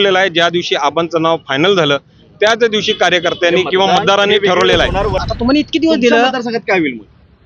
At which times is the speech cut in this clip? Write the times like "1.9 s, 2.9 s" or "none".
5.2 s